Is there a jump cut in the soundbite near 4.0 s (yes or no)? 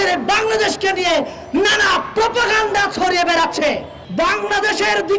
yes